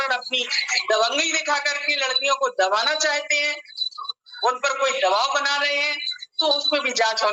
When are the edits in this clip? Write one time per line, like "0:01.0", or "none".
none